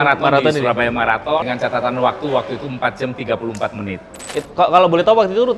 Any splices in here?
yes; 2 cuts; at 1.5 s, 4.3 s

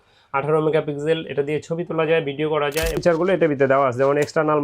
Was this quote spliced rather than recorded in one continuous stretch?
yes; 1 cut; at 3.0 s

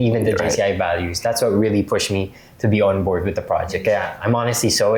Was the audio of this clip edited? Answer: no; 0 cuts

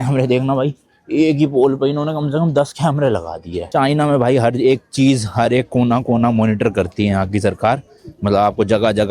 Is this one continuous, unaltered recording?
yes; 0 cuts

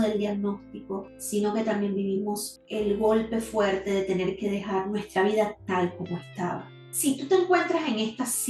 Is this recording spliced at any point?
yes; 1 cut; at 6.7 s

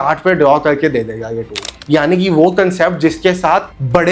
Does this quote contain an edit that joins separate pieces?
yes; 1 cut; at 1.7 s

